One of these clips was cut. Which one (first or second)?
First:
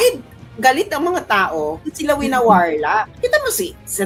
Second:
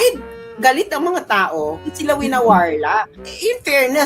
second